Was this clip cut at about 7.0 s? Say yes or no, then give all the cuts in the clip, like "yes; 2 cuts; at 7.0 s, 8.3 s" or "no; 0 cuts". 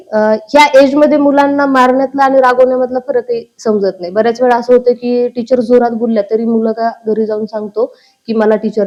no; 0 cuts